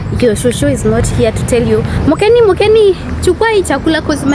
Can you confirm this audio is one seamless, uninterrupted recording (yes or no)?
yes